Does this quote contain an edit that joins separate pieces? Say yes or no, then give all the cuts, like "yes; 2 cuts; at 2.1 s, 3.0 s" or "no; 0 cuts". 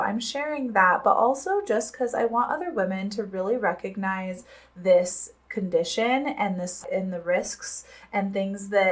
yes; 1 cut; at 6.8 s